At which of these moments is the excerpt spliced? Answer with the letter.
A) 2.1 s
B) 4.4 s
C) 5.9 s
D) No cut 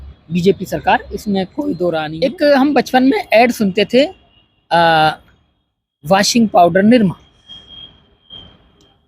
A